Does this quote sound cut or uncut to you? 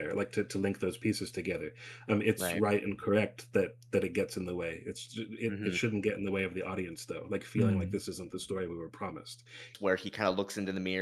cut